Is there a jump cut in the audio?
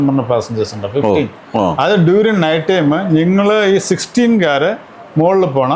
no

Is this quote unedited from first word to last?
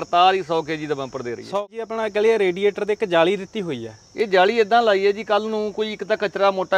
no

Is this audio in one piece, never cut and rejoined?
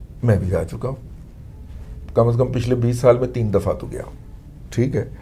yes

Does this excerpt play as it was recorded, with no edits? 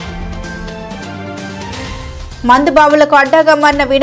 yes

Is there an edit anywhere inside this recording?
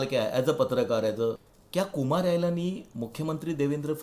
yes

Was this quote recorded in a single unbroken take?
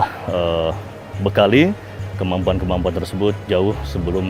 yes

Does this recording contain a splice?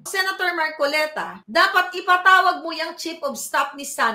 no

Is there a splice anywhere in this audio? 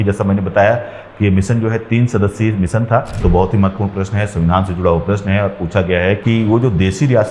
yes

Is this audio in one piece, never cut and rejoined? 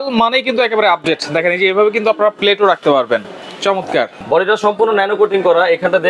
no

